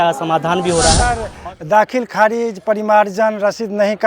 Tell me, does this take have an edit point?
yes; 1 cut; at 1.3 s

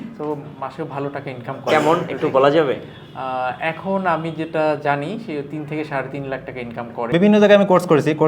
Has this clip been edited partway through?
yes; 1 cut; at 7.1 s

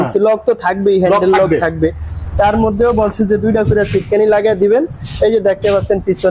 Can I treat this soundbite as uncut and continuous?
yes; 0 cuts

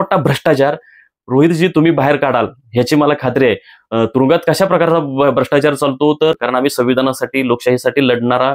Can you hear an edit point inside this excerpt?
yes; 1 cut; at 6.4 s

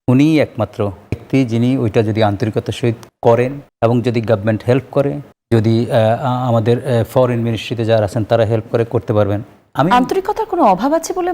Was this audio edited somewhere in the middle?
yes; 4 cuts; at 1.2 s, 3.1 s, 3.6 s, 5.3 s

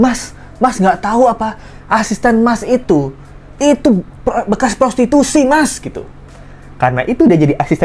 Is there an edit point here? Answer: no; 0 cuts

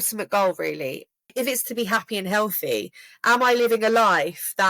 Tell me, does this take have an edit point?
yes; 1 cut; at 1.2 s

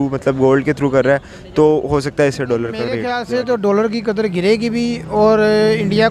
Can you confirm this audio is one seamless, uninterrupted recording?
no; 1 cut; at 3.1 s

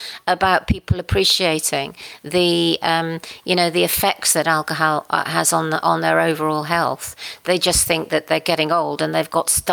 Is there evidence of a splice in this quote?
no; 0 cuts

